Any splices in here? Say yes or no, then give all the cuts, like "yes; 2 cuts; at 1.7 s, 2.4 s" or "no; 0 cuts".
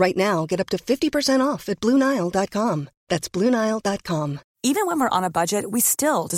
yes; 1 cut; at 4.4 s